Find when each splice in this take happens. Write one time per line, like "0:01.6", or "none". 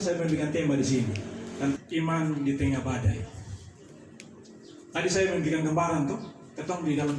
0:01.8